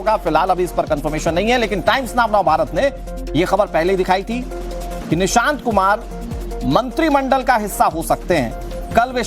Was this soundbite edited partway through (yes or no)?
yes